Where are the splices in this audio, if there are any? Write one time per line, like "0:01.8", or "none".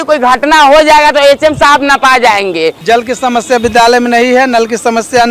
0:02.8